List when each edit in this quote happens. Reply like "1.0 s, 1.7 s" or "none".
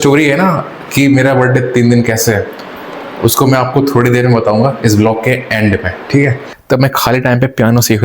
6.5 s